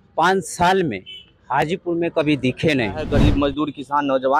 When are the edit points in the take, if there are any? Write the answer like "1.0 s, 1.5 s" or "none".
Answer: 3.1 s